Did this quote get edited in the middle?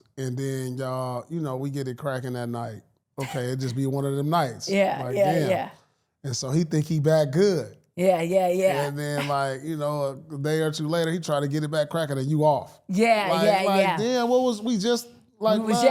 no; 0 cuts

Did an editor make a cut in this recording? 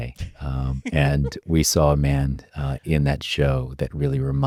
no; 0 cuts

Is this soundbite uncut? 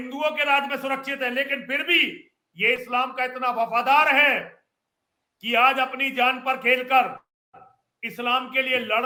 yes; 0 cuts

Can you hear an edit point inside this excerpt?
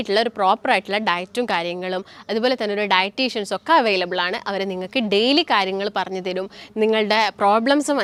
no; 0 cuts

